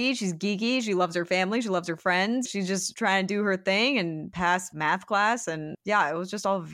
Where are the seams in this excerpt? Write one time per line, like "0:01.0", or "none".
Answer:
0:02.5
0:04.6
0:05.7